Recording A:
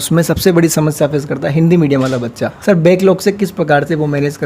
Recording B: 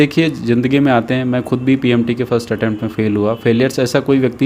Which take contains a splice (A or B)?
A